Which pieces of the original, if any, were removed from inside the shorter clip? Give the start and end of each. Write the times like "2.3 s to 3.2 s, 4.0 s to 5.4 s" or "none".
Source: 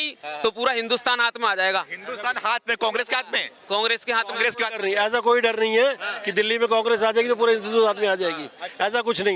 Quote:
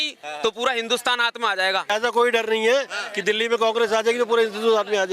1.9 s to 5.0 s